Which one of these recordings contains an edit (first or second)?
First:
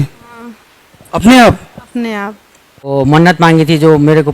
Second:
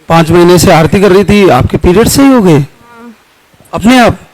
first